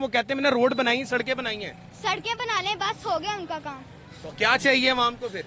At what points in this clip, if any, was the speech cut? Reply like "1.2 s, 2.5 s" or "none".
none